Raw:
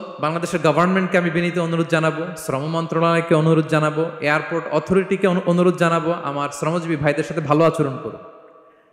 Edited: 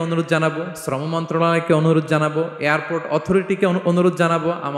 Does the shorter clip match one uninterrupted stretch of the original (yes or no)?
yes